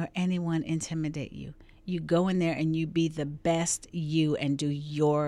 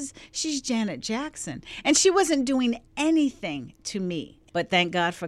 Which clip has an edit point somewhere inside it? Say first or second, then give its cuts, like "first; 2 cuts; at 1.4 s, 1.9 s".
second; 1 cut; at 4.4 s